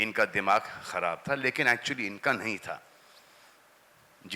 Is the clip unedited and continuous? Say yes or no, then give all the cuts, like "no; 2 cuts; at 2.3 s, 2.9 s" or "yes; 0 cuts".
yes; 0 cuts